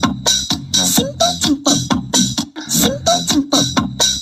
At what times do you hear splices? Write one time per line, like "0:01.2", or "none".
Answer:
0:02.5